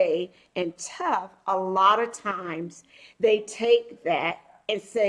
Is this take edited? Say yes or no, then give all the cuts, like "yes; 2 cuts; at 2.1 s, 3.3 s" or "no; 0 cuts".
no; 0 cuts